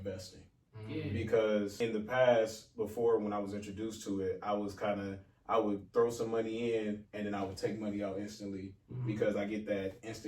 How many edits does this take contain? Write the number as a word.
one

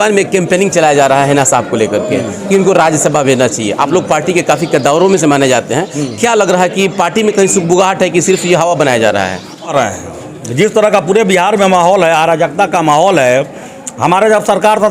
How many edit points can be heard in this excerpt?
one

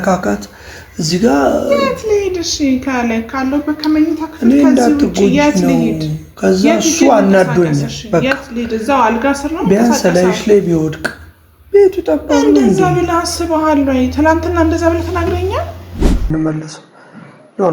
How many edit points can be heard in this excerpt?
one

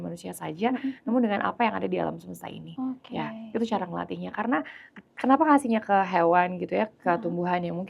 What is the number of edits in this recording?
zero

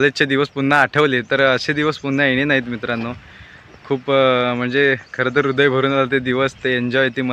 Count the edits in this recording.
zero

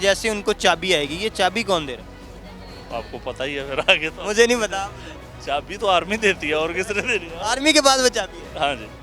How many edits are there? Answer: zero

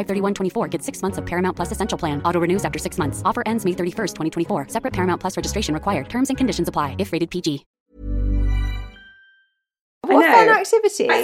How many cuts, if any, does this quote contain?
one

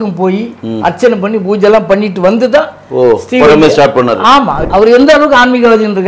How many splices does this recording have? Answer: one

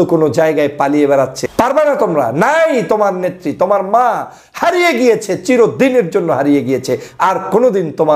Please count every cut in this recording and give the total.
one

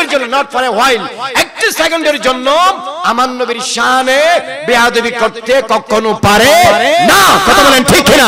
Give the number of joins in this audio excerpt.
zero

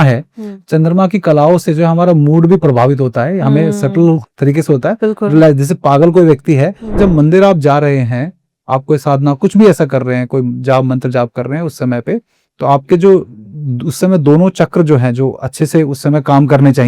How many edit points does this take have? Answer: one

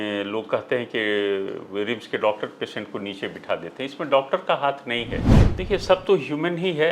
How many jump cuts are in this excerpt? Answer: one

